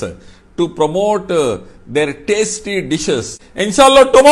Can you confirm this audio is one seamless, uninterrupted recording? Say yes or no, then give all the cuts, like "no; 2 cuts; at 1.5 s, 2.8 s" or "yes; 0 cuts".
no; 1 cut; at 3.4 s